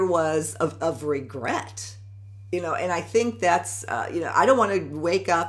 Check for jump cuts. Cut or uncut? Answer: uncut